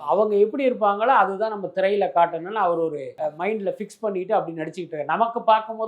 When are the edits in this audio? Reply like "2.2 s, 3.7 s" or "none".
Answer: 3.1 s